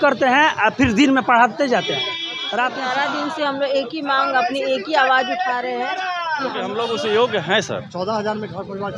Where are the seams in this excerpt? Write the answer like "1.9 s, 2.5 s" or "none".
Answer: 2.7 s, 6.7 s